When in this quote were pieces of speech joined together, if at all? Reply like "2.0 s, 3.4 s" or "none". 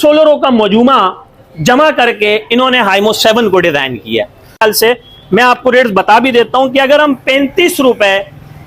4.6 s